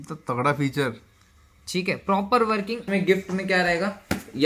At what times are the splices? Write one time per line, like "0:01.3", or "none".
0:02.8